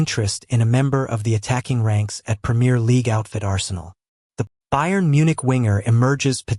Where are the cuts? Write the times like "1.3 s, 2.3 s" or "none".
4.5 s